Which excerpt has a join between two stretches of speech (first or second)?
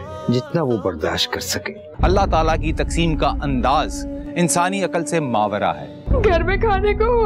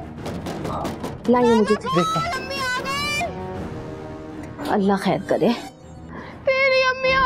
first